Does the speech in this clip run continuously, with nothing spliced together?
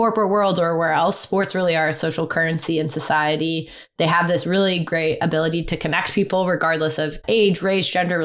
yes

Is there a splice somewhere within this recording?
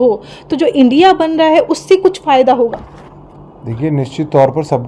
no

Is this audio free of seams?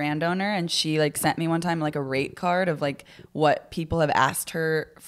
yes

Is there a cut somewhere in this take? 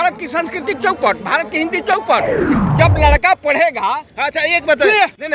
yes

